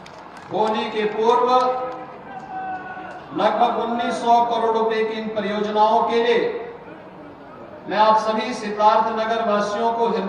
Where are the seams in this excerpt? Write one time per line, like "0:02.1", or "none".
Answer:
none